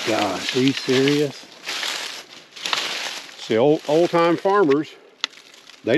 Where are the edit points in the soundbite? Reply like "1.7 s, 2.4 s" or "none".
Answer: none